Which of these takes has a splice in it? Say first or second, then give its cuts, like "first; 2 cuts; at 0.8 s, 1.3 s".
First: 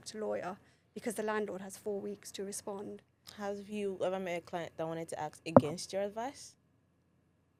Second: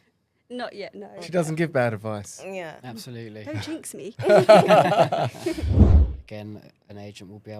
second; 1 cut; at 5.9 s